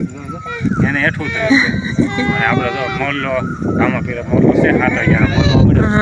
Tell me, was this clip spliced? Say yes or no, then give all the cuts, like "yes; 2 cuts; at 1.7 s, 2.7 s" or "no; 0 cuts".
no; 0 cuts